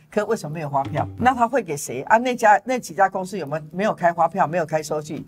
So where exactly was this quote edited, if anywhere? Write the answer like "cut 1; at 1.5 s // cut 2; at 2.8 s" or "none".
cut 1; at 1.1 s